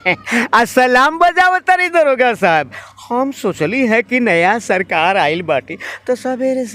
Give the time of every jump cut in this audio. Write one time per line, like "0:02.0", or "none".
none